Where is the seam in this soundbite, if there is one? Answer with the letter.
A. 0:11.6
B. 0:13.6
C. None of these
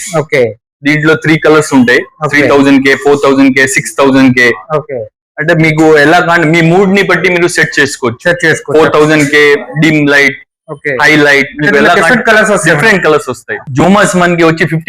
B